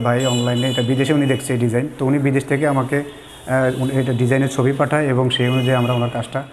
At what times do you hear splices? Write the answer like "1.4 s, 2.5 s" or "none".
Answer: none